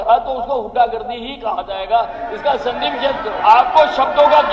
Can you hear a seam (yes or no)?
yes